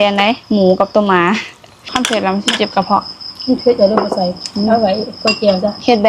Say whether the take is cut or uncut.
cut